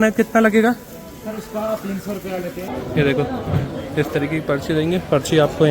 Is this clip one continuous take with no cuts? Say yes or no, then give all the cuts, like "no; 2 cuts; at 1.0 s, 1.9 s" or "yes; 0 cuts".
no; 1 cut; at 2.6 s